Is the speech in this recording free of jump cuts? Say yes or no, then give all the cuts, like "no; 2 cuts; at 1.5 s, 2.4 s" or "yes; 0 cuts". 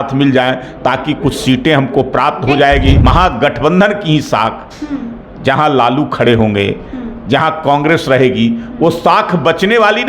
no; 1 cut; at 3.0 s